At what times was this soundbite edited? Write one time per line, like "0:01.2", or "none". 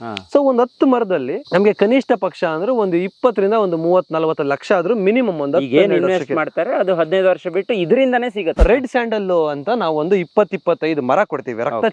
0:01.4
0:08.6